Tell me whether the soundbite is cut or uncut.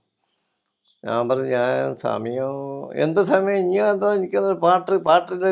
uncut